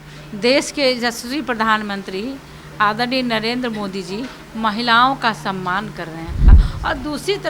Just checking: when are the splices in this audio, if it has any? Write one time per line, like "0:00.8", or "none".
0:06.5